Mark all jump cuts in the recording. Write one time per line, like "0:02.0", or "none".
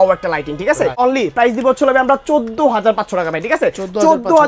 0:00.9